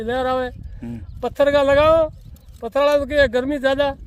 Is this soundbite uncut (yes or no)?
yes